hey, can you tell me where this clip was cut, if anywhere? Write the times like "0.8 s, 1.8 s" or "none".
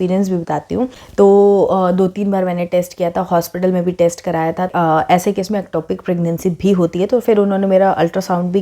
1.0 s, 4.7 s